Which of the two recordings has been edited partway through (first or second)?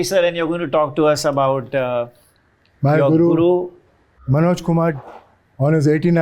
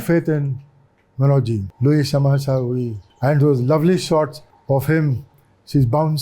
second